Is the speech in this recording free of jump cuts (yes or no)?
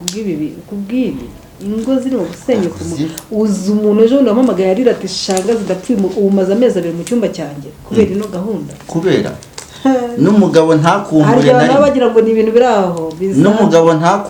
yes